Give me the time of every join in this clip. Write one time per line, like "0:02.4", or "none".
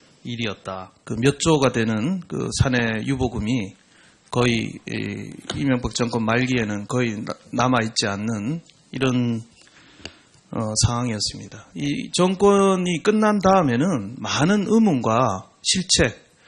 0:12.3